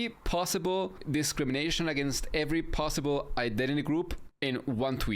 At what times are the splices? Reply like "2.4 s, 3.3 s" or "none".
1.0 s, 4.2 s